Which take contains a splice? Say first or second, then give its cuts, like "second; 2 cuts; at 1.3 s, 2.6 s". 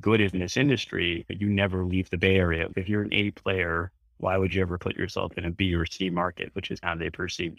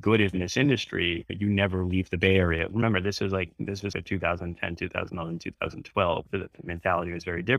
first; 1 cut; at 2.7 s